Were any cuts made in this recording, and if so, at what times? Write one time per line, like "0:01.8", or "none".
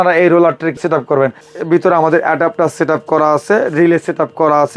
0:01.4